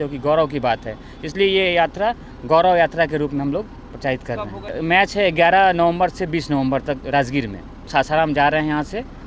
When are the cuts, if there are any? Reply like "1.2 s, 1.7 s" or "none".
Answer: 4.8 s, 7.9 s